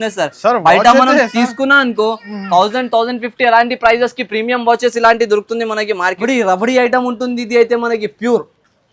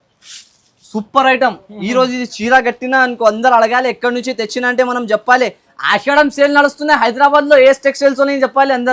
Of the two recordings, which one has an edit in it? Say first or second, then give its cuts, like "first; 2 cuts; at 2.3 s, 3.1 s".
first; 1 cut; at 6.2 s